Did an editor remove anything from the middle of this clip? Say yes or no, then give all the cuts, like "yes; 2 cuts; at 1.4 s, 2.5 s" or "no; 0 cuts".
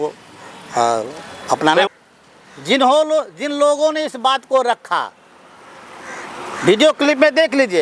yes; 1 cut; at 1.9 s